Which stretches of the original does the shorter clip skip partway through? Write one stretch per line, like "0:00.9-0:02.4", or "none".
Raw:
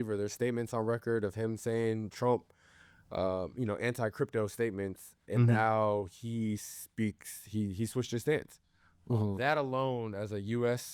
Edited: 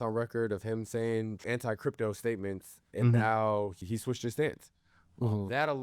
0:02.2-0:03.8
0:06.2-0:07.7